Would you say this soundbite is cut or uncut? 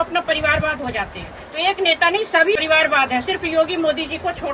cut